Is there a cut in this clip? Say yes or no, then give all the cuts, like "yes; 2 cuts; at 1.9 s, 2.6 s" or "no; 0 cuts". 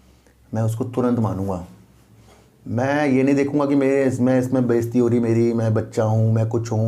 no; 0 cuts